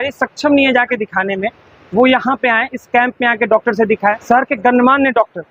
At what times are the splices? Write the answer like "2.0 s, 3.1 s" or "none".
4.2 s